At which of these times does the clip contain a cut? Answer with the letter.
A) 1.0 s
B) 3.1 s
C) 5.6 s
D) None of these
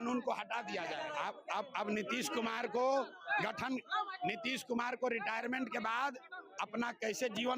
A